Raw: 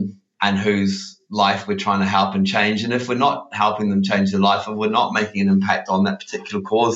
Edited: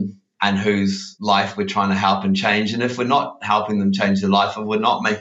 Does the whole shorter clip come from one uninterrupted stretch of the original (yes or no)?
no